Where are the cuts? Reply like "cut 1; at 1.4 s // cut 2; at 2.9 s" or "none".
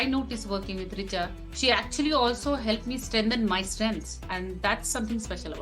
cut 1; at 4.2 s